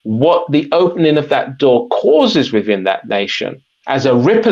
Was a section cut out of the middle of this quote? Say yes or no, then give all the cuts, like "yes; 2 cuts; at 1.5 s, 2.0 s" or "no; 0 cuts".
no; 0 cuts